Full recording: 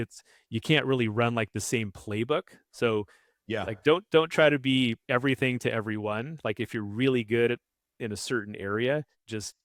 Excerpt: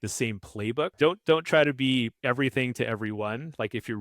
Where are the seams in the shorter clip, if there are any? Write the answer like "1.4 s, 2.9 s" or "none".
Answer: 0.9 s